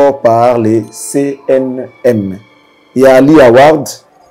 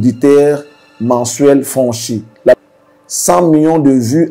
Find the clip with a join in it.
second; 1 cut; at 2.6 s

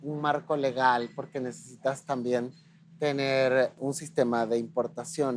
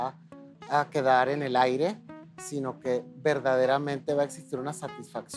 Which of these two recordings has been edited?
first; 1 cut; at 3.8 s

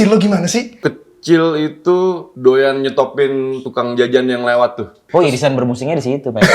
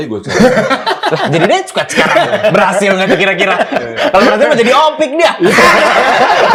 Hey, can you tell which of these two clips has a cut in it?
first; 4 cuts; at 0.8 s, 2.3 s, 3.6 s, 5.0 s

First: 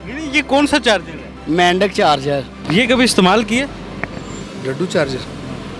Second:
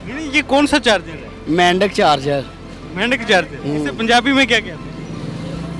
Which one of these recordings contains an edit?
first; 1 cut; at 2.5 s

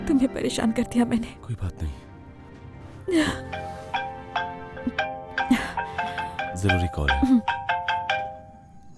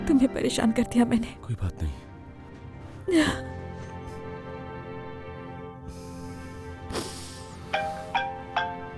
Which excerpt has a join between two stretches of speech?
first; 2 cuts; at 3.6 s, 6.5 s

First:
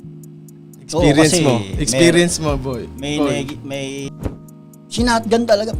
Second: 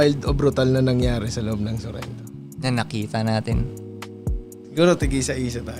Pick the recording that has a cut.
first; 2 cuts; at 0.9 s, 4.1 s

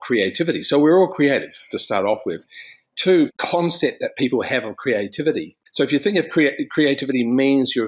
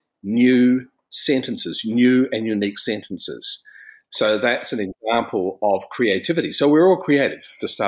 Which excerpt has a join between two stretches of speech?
first; 2 cuts; at 3.3 s, 5.6 s

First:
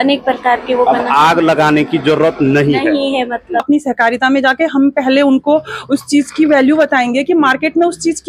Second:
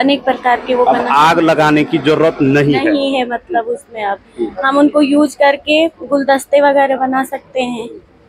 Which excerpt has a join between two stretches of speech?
first; 1 cut; at 3.6 s

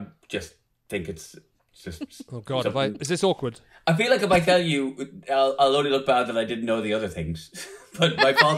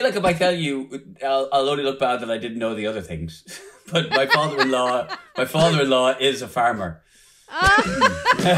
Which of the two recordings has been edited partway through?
first; 1 cut; at 3.0 s

